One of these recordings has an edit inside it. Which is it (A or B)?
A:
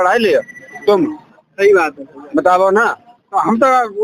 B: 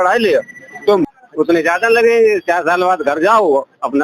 B